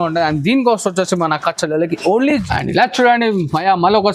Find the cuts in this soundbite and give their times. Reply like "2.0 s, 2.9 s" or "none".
2.4 s